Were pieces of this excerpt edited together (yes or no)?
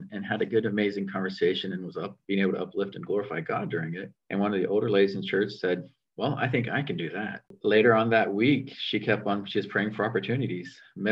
yes